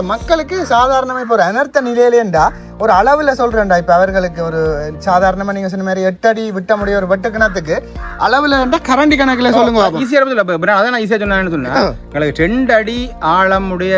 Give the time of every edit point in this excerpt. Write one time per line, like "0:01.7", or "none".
none